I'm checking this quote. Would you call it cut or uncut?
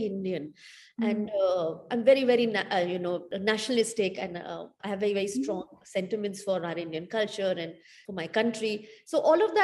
cut